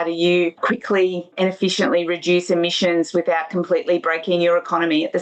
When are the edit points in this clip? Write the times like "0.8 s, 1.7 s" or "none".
none